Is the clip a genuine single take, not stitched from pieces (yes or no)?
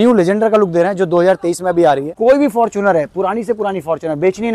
no